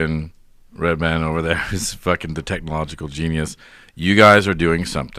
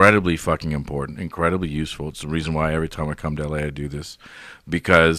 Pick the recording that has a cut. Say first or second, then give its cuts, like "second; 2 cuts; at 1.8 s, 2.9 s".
first; 1 cut; at 1.4 s